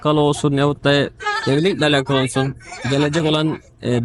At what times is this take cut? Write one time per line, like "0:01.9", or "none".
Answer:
none